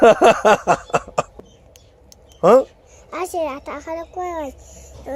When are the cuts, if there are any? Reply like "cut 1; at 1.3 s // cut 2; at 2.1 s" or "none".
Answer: cut 1; at 1.3 s